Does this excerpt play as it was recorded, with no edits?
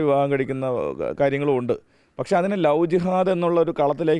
yes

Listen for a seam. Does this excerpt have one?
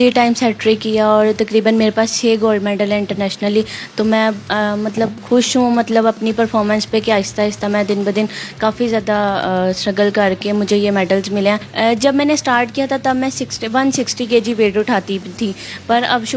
no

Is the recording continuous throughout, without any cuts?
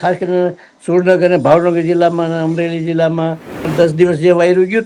no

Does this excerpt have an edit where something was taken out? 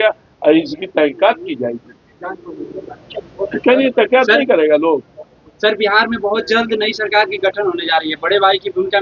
no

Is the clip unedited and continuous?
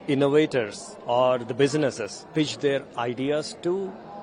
yes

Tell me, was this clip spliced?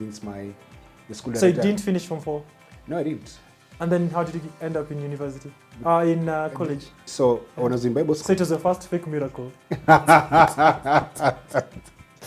no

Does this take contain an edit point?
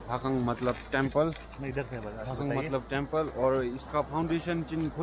no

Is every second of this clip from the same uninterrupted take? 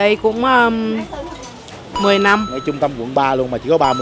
no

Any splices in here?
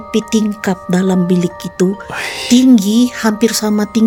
no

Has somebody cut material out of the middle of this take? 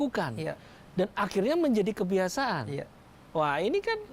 no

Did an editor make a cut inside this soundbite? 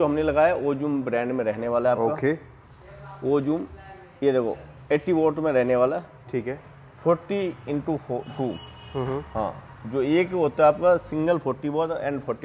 no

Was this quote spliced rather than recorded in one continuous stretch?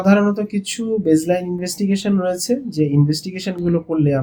no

